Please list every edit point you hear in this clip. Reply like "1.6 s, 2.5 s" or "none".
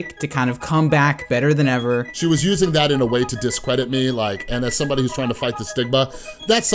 2.1 s